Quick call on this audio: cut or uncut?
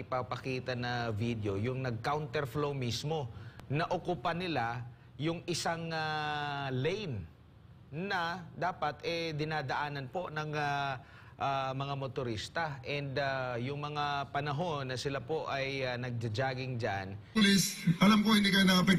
cut